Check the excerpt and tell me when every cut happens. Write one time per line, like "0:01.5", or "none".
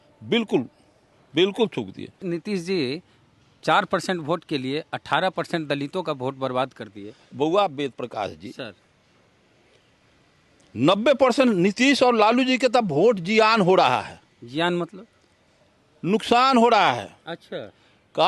0:02.1